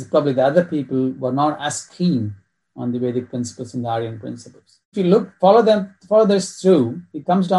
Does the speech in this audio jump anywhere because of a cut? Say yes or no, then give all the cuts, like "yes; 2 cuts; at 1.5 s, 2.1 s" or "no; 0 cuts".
yes; 1 cut; at 4.9 s